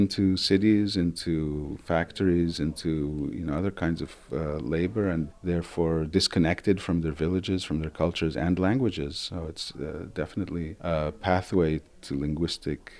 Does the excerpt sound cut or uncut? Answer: cut